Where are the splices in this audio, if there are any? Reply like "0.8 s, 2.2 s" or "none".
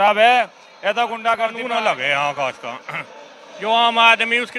1.6 s